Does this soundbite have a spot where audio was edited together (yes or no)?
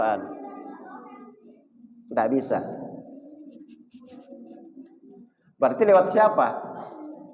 no